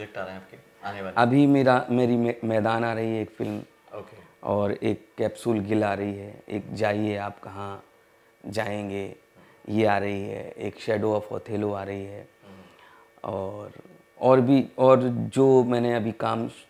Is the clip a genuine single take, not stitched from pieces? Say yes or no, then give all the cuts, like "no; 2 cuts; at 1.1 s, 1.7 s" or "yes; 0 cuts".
yes; 0 cuts